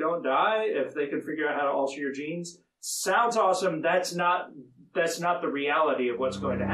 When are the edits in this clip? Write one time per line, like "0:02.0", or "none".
none